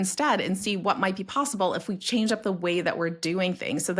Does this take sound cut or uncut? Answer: uncut